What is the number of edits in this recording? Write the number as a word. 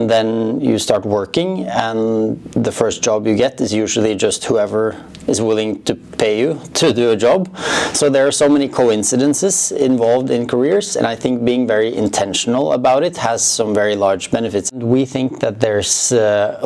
one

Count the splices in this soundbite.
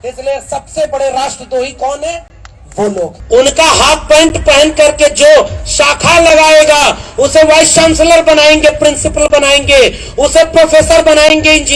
one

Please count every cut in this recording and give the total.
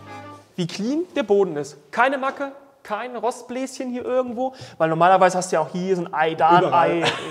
zero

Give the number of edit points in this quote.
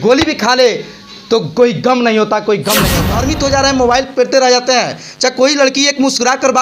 one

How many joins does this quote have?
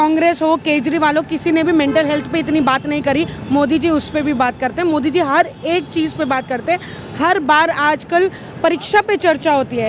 zero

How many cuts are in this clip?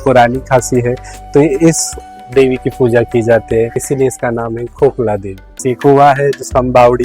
two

